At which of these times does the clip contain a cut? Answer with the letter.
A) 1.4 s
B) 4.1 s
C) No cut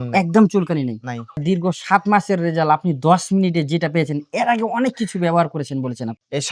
A